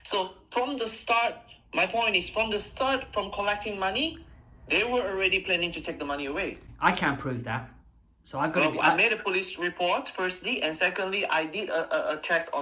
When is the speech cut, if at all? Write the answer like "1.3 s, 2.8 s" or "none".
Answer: none